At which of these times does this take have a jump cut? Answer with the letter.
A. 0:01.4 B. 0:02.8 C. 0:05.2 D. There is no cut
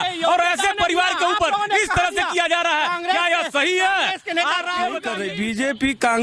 C